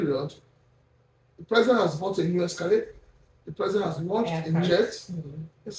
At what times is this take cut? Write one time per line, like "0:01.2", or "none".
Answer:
0:04.7